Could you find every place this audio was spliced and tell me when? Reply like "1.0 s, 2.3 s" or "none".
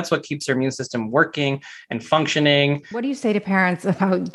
3.1 s